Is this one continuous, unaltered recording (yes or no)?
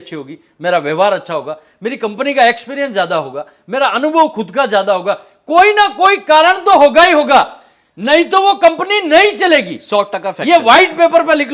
yes